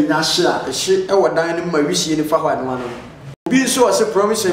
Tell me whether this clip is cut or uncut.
cut